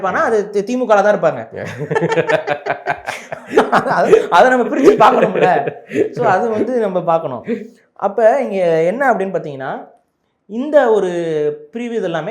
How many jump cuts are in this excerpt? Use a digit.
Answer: 0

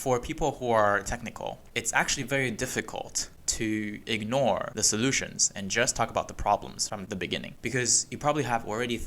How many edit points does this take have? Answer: 2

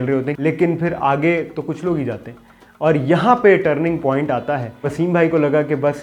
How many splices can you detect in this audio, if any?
1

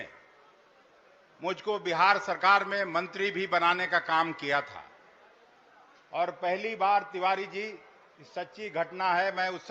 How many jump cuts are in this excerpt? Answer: 0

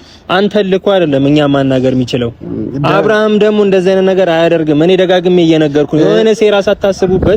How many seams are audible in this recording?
0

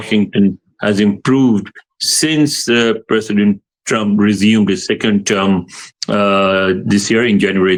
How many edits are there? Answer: 0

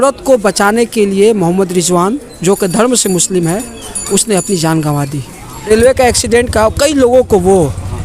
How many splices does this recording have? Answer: 1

